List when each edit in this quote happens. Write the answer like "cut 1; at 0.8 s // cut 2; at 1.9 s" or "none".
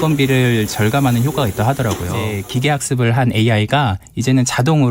cut 1; at 2.3 s